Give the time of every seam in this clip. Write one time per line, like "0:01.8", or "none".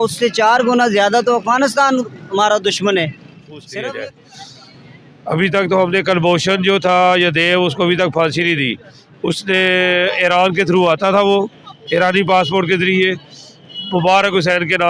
0:03.6